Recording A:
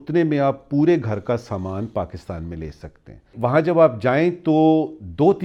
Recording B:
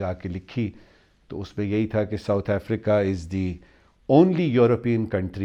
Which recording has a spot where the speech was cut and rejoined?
A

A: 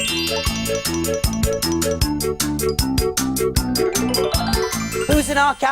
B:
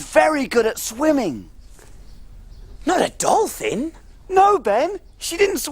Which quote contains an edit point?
B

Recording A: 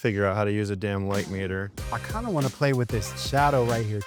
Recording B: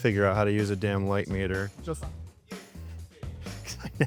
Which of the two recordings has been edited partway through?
A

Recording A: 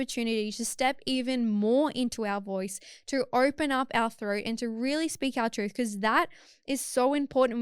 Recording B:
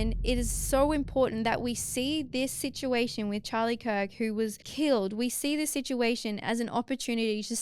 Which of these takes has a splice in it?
B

